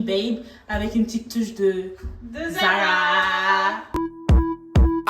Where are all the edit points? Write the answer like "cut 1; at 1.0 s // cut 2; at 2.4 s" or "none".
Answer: cut 1; at 3.8 s

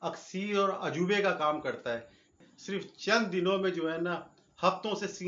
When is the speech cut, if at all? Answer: cut 1; at 2.5 s

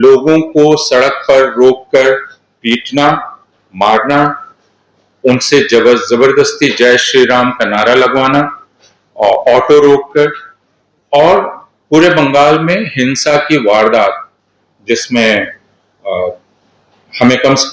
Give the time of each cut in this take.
none

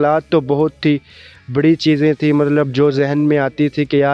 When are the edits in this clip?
none

